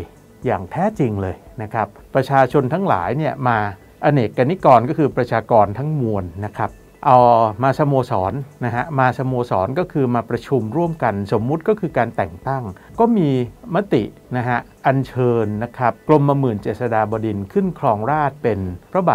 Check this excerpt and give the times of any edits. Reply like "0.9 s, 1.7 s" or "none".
2.0 s, 12.9 s